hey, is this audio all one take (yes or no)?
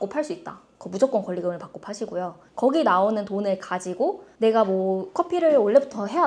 yes